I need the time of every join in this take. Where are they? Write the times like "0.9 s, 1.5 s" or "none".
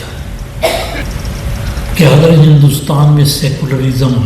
1.0 s